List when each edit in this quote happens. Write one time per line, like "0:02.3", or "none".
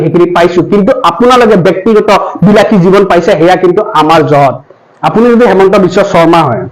0:04.7